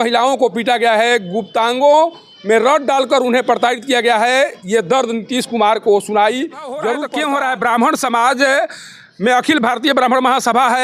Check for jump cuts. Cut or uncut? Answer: cut